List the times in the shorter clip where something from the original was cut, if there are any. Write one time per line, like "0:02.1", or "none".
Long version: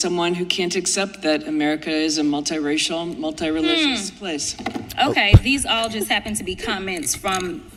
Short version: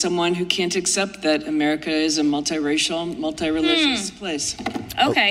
none